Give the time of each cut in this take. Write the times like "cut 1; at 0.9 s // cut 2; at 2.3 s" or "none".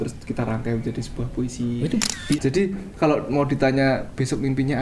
cut 1; at 2.4 s